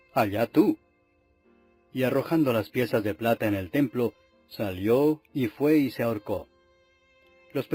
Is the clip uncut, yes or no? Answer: yes